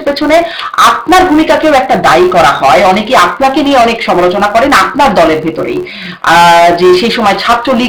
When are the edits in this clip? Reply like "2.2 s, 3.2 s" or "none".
none